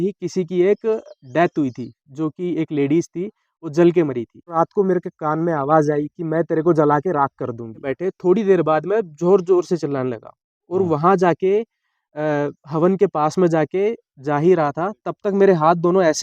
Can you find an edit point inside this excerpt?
yes; 2 cuts; at 4.5 s, 7.9 s

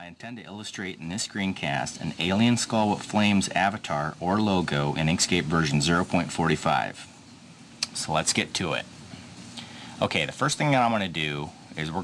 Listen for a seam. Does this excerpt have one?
yes; 1 cut; at 1.2 s

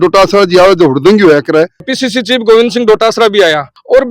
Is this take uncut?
no; 1 cut; at 1.9 s

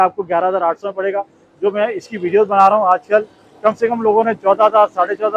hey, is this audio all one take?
yes; 0 cuts

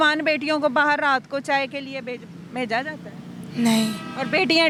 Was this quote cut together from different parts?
no; 0 cuts

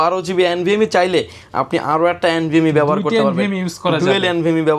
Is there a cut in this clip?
no; 0 cuts

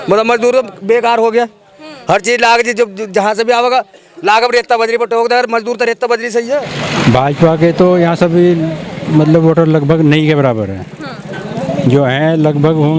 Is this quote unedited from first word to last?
no; 1 cut; at 6.8 s

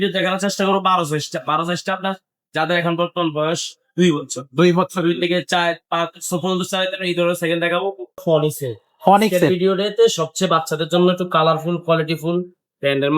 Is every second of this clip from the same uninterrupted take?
no; 1 cut; at 8.2 s

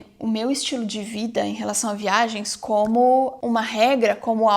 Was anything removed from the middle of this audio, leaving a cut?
no; 0 cuts

